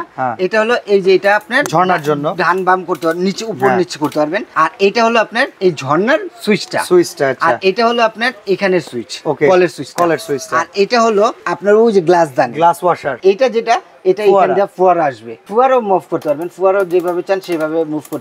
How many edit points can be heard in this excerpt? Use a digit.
5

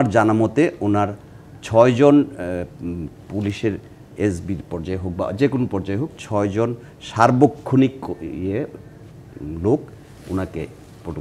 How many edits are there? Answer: 0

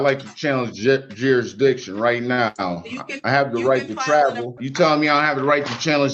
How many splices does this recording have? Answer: 1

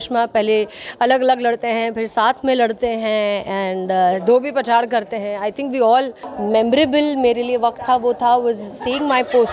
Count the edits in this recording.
1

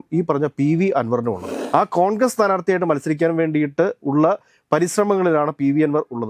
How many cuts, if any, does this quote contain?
1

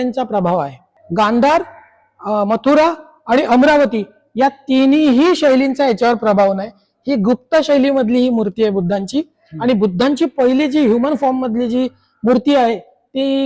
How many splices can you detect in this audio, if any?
1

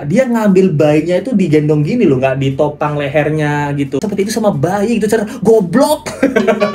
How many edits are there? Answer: 1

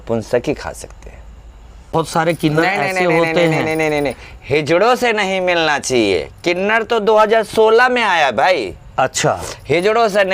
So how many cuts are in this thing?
1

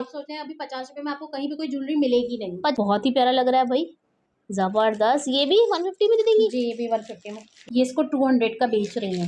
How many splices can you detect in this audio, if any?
2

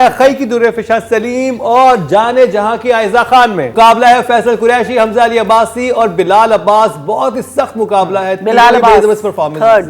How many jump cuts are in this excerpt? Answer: 1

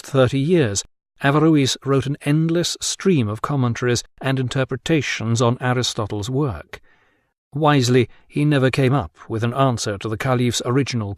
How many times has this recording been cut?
0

